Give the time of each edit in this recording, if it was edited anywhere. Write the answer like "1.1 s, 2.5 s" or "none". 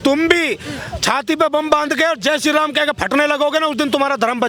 none